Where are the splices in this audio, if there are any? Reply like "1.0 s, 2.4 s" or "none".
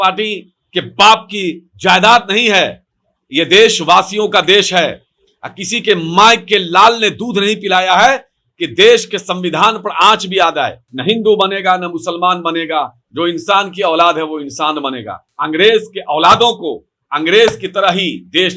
10.8 s, 15.3 s